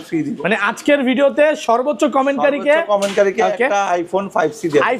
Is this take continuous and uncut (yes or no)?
yes